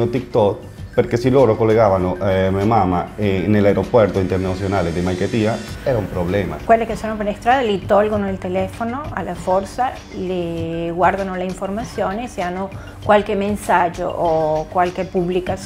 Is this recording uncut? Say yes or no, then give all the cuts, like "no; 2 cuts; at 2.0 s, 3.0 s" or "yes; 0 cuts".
no; 1 cut; at 6.6 s